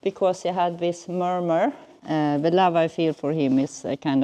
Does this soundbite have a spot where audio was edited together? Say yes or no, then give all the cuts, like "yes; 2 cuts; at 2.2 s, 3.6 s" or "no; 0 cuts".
yes; 1 cut; at 1.9 s